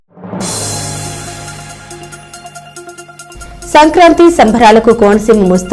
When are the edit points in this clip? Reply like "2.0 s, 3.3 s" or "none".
3.3 s

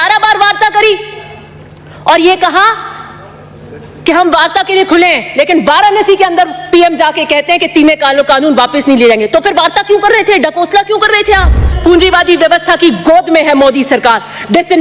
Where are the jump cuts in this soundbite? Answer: 11.8 s

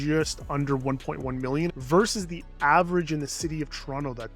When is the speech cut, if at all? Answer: 1.7 s

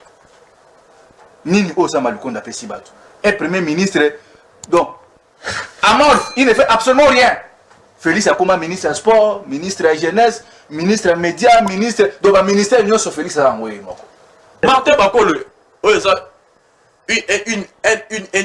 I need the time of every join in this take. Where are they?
14.6 s

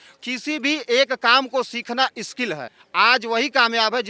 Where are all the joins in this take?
2.8 s

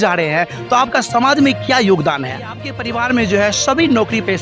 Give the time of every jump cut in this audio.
2.7 s

